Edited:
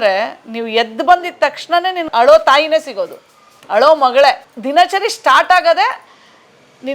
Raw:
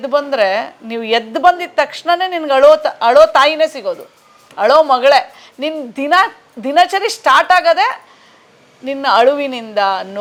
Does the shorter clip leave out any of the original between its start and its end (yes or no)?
yes